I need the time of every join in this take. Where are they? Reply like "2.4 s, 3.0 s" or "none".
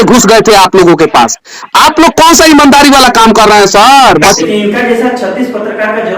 4.4 s